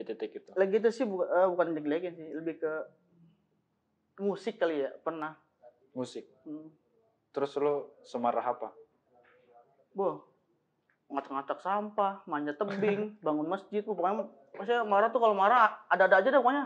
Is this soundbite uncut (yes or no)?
yes